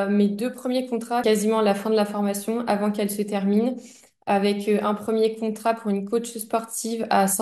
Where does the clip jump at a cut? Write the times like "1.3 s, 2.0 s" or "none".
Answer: 1.2 s